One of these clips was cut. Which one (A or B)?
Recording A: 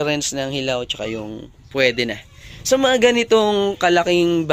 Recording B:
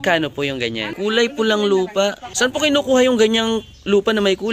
B